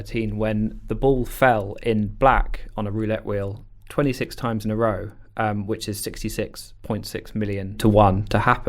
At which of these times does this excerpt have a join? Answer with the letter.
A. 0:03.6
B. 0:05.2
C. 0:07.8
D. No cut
C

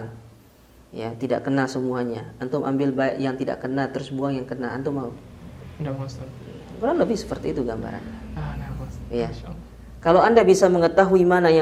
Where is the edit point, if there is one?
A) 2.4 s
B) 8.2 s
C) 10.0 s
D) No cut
D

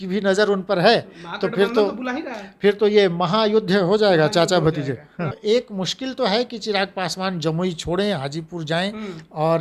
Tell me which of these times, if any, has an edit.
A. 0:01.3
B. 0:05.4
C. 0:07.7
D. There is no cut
B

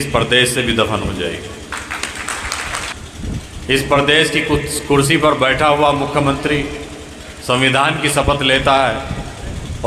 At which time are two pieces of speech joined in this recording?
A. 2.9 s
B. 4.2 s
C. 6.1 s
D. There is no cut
A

